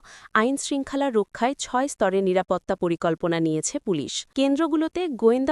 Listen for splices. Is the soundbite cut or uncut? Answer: cut